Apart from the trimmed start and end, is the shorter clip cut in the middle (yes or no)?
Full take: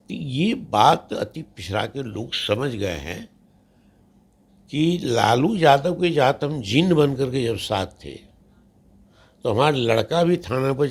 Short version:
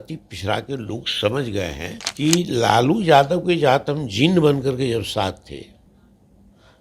yes